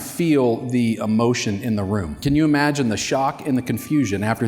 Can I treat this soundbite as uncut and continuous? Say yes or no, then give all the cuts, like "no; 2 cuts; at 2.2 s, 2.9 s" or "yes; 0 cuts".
no; 1 cut; at 2.2 s